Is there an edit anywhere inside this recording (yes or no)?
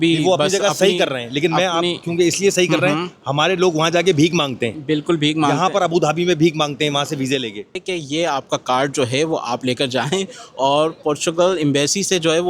yes